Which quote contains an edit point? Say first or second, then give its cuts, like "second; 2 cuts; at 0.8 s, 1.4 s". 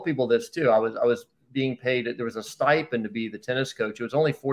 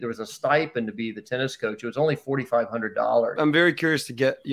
second; 1 cut; at 3.4 s